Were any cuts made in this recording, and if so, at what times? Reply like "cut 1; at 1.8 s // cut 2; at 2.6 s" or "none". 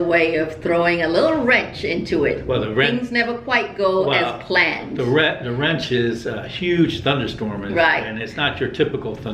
none